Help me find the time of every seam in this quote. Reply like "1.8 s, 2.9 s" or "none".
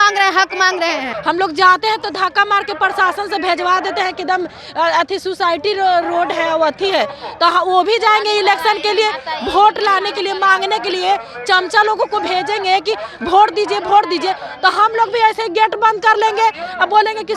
1.1 s

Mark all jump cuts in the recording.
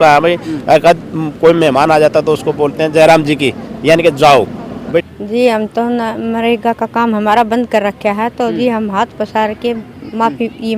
4.7 s

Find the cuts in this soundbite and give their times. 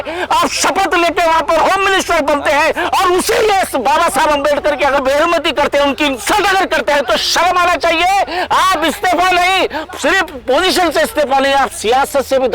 2.9 s, 5.0 s

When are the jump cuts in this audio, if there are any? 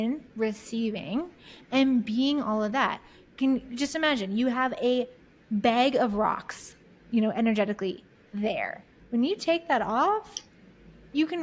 none

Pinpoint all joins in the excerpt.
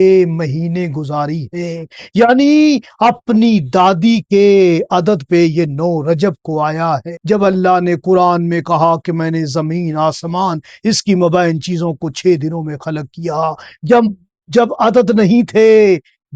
7.1 s

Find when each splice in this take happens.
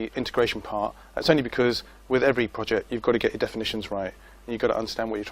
3.4 s

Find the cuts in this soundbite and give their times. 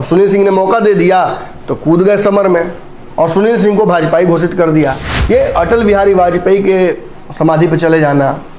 5.1 s

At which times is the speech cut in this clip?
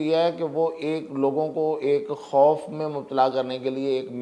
none

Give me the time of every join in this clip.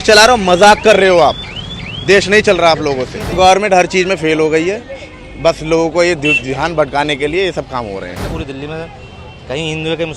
3.2 s, 8.3 s

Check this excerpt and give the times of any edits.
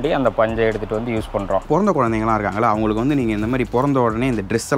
1.6 s

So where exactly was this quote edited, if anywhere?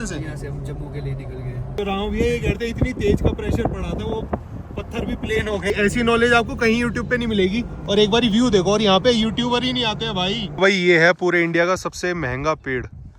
1.8 s, 5.7 s, 10.5 s

